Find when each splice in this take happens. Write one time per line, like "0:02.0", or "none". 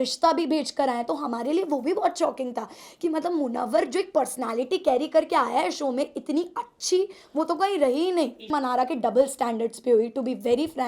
0:08.5